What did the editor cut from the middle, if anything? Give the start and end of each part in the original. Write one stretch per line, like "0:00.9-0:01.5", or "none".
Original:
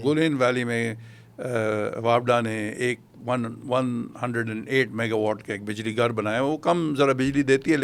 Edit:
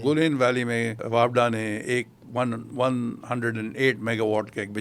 0:01.0-0:01.9